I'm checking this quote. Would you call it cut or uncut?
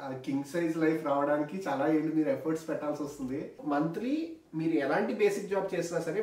cut